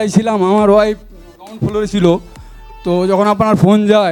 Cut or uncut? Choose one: uncut